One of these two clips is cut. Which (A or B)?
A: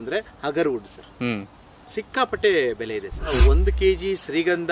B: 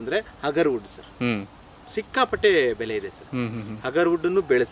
A